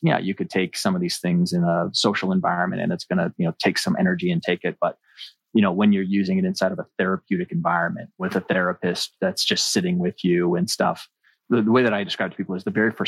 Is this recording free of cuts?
no; 2 cuts; at 8.2 s, 11.3 s

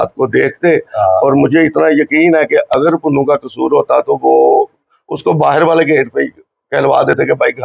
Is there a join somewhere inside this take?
no; 0 cuts

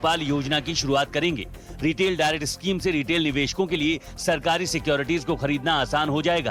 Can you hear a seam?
no; 0 cuts

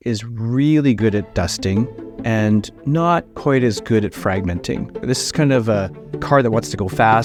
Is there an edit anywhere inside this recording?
no; 0 cuts

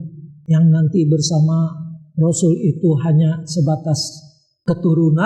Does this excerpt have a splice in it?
no; 0 cuts

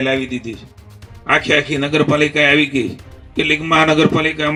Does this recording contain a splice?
no; 0 cuts

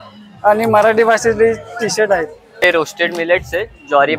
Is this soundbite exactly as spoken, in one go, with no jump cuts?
no; 1 cut; at 2.6 s

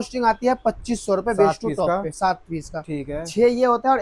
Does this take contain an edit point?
no; 0 cuts

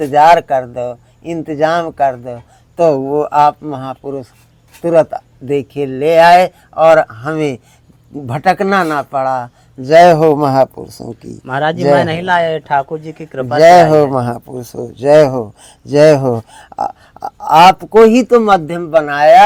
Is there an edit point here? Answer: no; 0 cuts

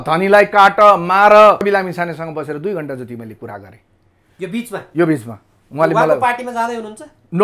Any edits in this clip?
yes; 1 cut; at 1.6 s

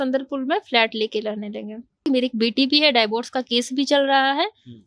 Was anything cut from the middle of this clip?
yes; 1 cut; at 2.0 s

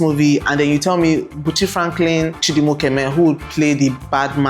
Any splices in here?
yes; 1 cut; at 2.4 s

